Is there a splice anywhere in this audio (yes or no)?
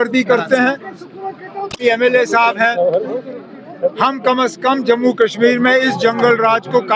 yes